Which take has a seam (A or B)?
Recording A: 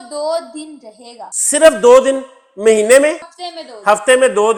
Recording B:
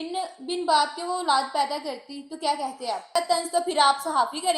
B